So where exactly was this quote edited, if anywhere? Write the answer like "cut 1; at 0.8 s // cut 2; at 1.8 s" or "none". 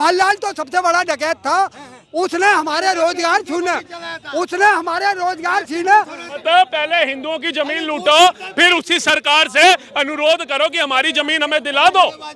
cut 1; at 6.2 s